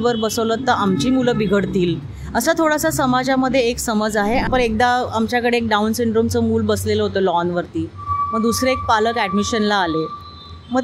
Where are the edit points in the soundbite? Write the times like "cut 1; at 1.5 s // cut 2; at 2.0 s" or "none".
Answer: cut 1; at 4.5 s